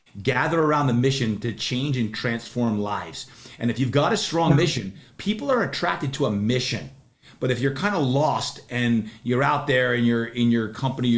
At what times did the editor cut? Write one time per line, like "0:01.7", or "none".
none